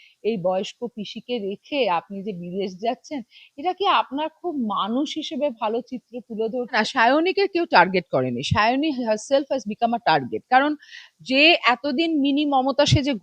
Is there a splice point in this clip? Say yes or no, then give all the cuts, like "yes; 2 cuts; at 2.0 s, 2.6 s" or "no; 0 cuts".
yes; 1 cut; at 6.8 s